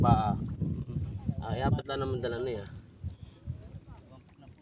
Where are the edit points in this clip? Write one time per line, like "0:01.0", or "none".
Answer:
none